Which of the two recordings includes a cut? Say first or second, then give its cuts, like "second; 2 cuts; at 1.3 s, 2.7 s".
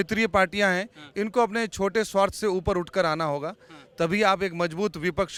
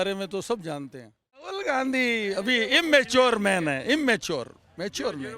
second; 1 cut; at 1.5 s